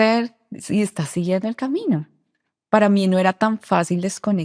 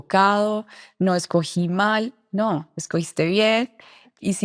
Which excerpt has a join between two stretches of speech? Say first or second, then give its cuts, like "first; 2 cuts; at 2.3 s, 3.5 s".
first; 1 cut; at 2.1 s